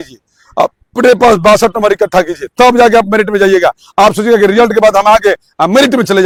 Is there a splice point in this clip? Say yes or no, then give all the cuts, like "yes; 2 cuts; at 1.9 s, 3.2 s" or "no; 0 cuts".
no; 0 cuts